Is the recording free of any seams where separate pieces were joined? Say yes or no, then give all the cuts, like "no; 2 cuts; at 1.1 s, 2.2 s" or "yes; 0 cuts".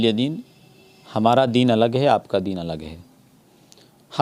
yes; 0 cuts